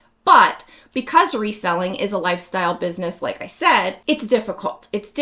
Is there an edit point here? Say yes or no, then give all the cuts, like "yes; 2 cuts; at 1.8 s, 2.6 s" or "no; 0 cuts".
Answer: yes; 1 cut; at 4.0 s